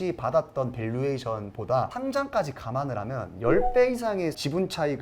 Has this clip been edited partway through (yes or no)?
yes